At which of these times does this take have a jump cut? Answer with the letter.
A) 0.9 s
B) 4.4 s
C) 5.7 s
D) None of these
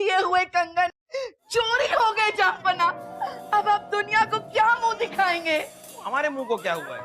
A